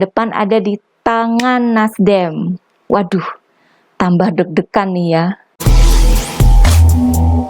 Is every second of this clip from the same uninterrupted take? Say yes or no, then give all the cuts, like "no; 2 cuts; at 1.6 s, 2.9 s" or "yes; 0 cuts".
no; 1 cut; at 5.5 s